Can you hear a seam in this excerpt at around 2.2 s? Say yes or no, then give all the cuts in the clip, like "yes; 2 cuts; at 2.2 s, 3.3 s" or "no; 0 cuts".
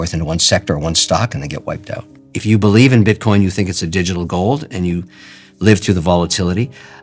yes; 1 cut; at 2.2 s